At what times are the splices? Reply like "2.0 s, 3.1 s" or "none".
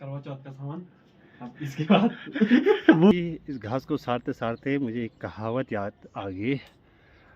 3.1 s